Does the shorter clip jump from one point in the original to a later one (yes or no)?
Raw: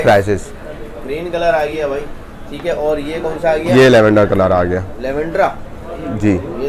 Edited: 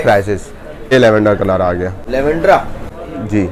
yes